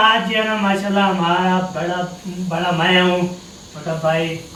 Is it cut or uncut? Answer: uncut